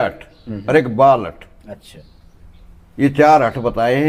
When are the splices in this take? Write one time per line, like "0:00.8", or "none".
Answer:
none